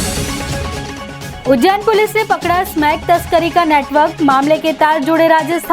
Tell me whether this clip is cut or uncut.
cut